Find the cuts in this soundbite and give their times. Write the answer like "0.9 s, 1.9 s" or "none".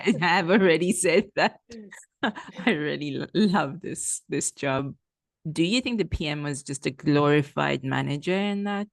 4.8 s